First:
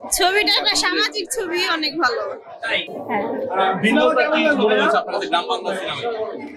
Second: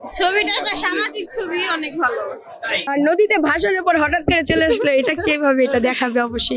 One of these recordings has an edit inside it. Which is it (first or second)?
second